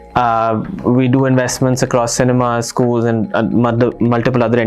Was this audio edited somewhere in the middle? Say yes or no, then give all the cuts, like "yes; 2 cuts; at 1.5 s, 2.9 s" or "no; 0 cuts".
no; 0 cuts